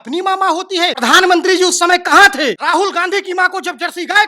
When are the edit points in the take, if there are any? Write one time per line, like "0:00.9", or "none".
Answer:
0:01.0
0:02.6